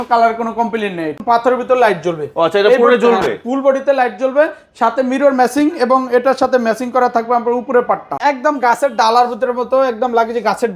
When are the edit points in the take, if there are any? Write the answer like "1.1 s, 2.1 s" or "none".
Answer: 1.2 s, 8.2 s